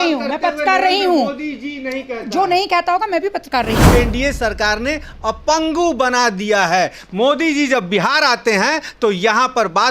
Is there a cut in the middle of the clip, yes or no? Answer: yes